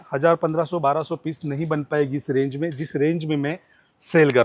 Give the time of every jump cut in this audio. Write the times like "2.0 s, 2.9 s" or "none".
none